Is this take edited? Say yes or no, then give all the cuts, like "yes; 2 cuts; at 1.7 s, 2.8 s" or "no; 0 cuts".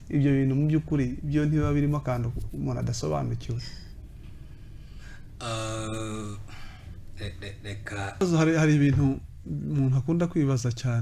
yes; 1 cut; at 8.2 s